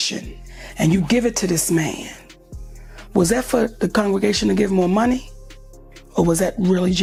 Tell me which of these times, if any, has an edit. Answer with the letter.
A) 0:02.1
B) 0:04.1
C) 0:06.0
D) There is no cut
D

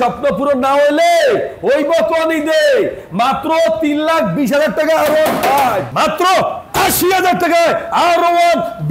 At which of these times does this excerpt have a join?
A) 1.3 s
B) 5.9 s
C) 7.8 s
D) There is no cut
B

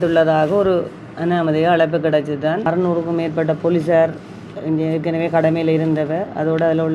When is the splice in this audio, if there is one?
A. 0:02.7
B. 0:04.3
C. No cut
A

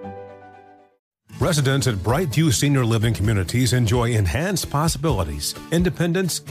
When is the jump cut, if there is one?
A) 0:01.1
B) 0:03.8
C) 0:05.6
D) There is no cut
A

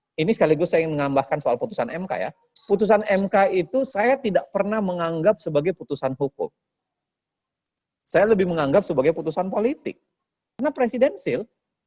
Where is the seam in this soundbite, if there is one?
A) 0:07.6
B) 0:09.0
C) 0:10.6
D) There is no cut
C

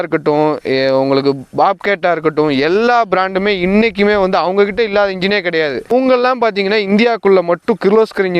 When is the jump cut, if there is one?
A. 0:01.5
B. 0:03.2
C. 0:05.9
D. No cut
C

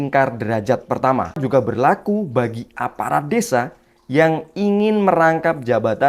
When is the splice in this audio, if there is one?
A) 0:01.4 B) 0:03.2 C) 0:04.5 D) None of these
A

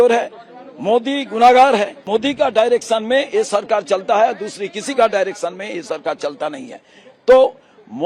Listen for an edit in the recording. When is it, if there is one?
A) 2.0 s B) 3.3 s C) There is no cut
A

